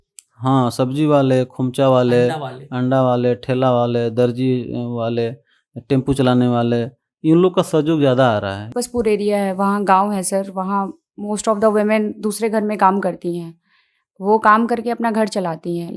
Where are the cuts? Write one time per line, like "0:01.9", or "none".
0:08.7